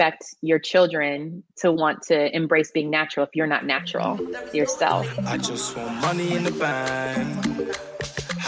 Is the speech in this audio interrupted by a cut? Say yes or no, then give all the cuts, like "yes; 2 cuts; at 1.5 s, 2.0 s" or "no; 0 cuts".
yes; 1 cut; at 5.1 s